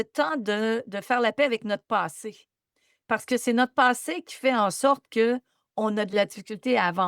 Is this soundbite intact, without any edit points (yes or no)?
no